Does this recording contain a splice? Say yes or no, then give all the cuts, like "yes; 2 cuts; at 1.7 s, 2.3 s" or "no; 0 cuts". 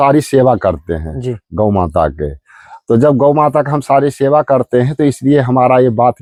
no; 0 cuts